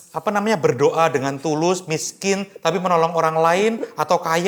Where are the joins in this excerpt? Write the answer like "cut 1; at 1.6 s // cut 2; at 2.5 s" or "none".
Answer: none

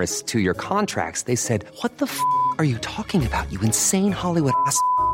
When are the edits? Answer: none

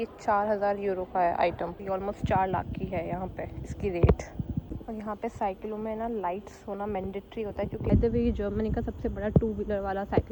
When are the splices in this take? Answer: cut 1; at 1.8 s // cut 2; at 4.7 s // cut 3; at 7.9 s

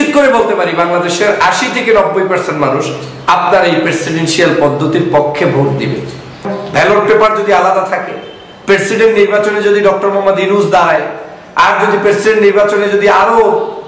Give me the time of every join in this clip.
cut 1; at 6.4 s

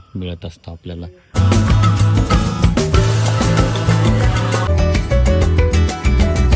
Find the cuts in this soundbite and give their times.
cut 1; at 1.3 s // cut 2; at 4.7 s

